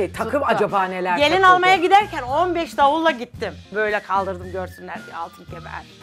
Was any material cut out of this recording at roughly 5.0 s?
no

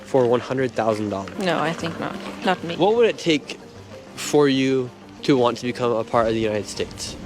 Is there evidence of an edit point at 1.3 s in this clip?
yes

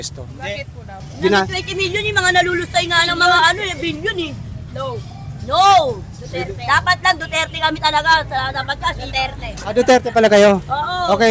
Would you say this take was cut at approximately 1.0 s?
yes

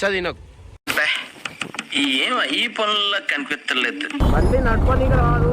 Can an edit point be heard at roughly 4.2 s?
yes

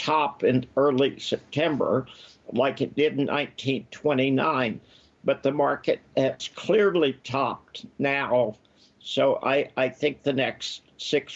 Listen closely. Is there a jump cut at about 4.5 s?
no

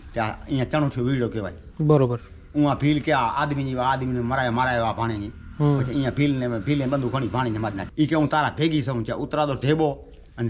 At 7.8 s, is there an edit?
yes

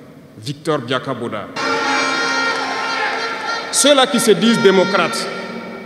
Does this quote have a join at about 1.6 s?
yes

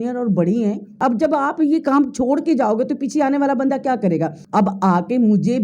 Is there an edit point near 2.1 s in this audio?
no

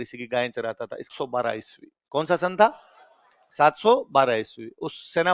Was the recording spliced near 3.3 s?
no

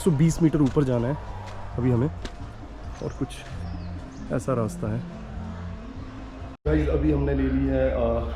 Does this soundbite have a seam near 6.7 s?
yes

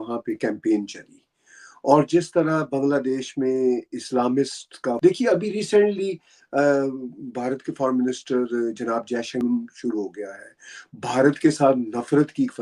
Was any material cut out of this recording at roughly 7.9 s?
no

